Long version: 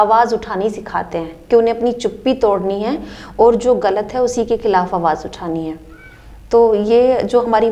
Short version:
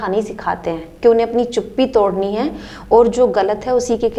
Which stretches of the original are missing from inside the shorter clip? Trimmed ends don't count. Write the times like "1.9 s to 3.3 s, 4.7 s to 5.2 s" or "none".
none